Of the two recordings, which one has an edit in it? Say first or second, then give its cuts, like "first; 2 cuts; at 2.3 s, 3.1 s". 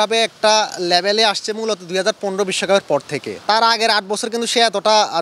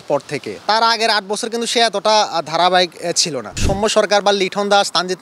second; 1 cut; at 3.5 s